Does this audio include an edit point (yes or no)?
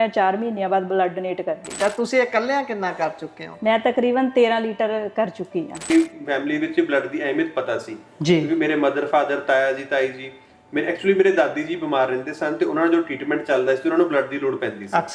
yes